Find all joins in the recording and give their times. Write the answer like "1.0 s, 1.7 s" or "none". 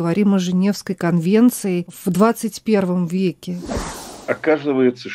1.9 s, 3.8 s